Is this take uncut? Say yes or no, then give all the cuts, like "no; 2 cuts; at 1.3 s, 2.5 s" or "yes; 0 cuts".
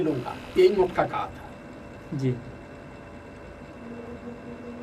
yes; 0 cuts